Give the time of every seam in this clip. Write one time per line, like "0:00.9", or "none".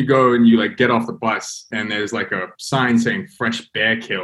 0:01.6